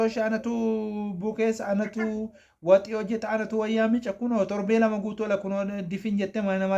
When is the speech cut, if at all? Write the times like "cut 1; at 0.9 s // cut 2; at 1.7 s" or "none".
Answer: none